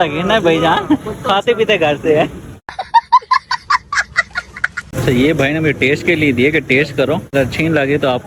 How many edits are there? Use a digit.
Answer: 0